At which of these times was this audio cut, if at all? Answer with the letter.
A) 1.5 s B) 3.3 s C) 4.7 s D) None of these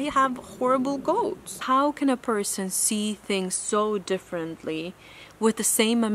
A